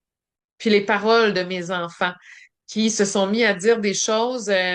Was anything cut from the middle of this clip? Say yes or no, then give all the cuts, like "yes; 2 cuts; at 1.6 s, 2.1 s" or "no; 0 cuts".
no; 0 cuts